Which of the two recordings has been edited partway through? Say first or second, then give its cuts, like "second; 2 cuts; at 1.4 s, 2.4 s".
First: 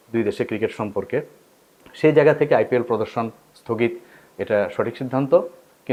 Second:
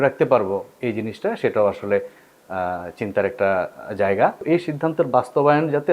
second; 1 cut; at 4.4 s